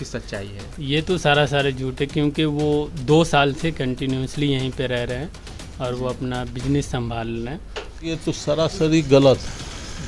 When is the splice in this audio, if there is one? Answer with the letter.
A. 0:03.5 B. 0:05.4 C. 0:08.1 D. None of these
C